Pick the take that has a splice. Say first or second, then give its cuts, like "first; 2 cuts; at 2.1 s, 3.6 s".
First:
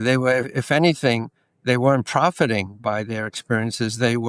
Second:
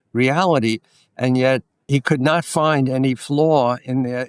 second; 1 cut; at 1.8 s